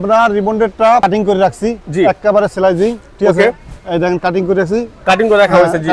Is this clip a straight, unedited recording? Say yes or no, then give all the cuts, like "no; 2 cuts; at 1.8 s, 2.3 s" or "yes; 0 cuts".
no; 1 cut; at 1.0 s